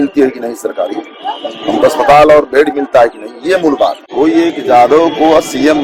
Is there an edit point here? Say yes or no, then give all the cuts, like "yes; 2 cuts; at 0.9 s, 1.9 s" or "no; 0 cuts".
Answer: yes; 1 cut; at 4.1 s